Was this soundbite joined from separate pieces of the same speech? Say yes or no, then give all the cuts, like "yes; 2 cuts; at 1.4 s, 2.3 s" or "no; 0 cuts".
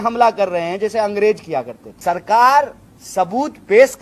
yes; 1 cut; at 1.9 s